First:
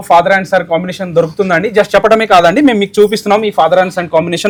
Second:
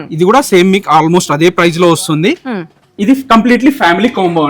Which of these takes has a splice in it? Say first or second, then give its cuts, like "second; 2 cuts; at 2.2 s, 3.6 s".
second; 1 cut; at 2.9 s